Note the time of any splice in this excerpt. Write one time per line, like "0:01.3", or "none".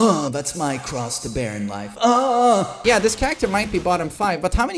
0:02.7